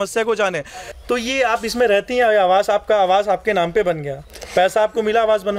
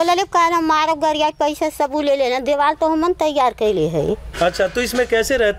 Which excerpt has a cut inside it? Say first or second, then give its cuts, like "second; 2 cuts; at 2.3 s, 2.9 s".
first; 1 cut; at 1.0 s